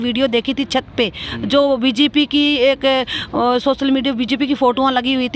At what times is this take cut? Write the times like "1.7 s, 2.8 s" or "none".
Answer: none